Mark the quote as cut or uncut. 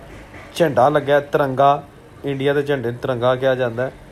uncut